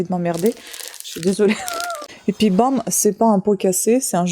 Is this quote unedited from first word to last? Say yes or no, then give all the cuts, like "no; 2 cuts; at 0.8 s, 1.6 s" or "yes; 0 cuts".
no; 1 cut; at 1.9 s